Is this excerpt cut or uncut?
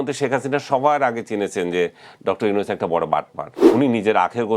cut